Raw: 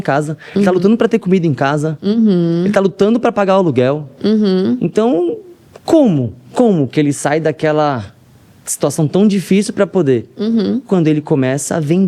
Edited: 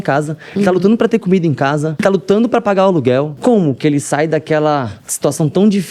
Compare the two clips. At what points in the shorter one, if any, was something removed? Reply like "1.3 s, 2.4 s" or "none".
2.0 s, 3.3 s, 5.0 s